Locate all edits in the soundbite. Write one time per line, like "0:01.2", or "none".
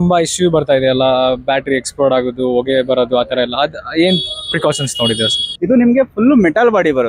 0:05.5